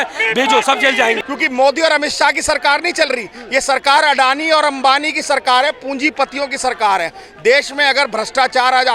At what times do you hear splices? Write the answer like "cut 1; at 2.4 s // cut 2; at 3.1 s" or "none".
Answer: cut 1; at 1.2 s